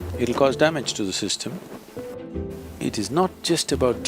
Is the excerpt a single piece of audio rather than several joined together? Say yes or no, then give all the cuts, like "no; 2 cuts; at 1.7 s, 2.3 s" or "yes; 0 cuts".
no; 1 cut; at 2.2 s